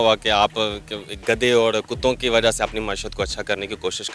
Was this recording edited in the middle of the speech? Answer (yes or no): no